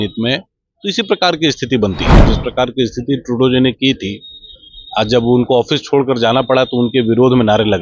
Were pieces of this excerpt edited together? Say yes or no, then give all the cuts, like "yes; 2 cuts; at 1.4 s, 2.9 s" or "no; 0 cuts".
yes; 1 cut; at 2.1 s